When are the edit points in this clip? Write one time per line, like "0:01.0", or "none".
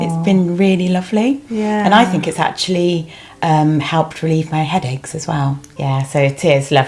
0:05.7